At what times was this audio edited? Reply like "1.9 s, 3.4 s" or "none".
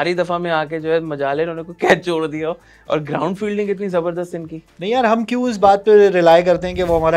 none